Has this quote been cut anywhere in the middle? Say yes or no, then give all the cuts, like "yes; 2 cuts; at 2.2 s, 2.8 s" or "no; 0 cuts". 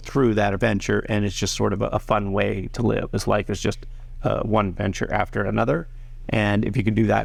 no; 0 cuts